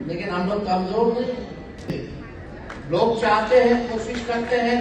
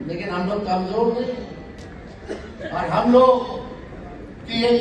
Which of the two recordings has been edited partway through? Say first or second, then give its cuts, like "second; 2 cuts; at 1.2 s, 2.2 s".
first; 1 cut; at 1.9 s